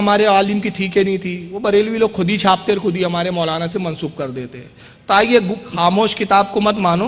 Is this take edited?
yes; 1 cut; at 5.7 s

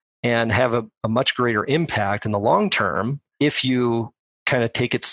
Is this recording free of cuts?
no; 2 cuts; at 0.9 s, 3.3 s

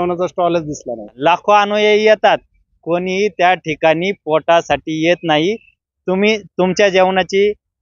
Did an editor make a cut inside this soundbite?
yes; 2 cuts; at 1.2 s, 5.7 s

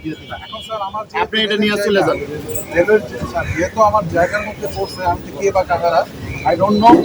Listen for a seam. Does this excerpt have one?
no; 0 cuts

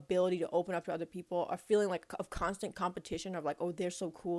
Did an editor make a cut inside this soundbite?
no; 0 cuts

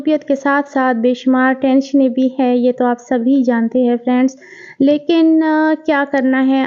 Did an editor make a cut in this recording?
no; 0 cuts

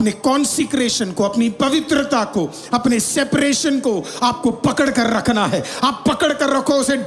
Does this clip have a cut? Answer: no; 0 cuts

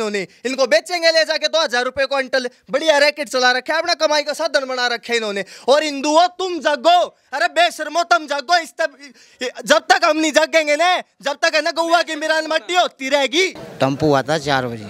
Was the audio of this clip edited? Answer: yes; 1 cut; at 13.6 s

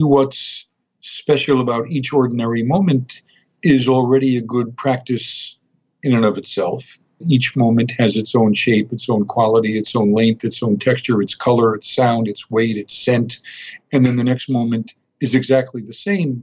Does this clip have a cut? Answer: yes; 2 cuts; at 7.2 s, 13.7 s

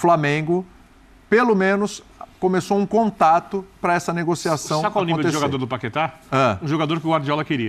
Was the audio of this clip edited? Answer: no; 0 cuts

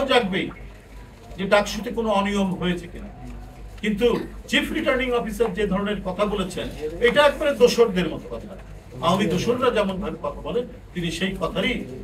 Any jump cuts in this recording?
no; 0 cuts

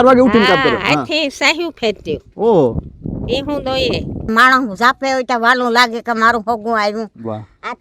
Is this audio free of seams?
no; 1 cut; at 4.3 s

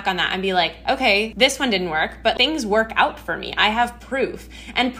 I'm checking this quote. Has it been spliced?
yes; 2 cuts; at 1.3 s, 2.3 s

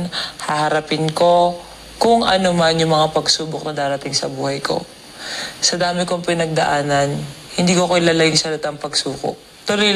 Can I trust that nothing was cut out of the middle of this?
yes; 0 cuts

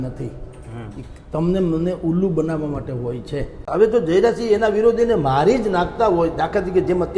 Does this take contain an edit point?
yes; 1 cut; at 3.7 s

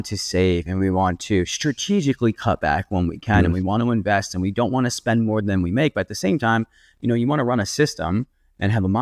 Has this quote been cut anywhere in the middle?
no; 0 cuts

